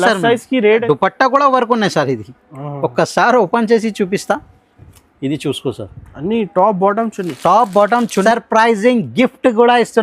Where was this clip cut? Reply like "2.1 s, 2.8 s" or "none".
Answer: 0.8 s, 8.2 s